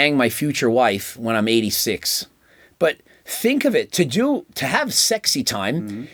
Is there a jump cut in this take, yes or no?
no